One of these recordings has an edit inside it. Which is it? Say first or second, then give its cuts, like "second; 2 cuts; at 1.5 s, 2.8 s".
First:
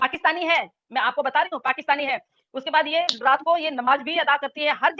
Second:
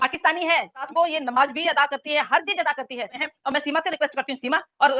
second; 2 cuts; at 0.9 s, 3.2 s